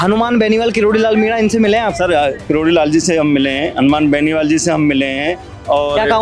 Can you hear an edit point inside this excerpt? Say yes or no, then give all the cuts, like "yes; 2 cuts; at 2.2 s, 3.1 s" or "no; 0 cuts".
no; 0 cuts